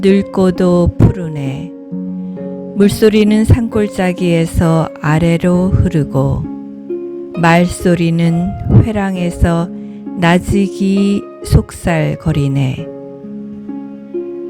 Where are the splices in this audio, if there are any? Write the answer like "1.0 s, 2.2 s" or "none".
12.8 s